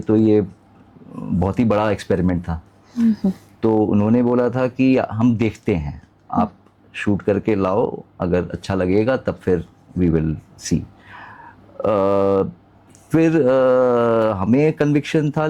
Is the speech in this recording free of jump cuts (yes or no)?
yes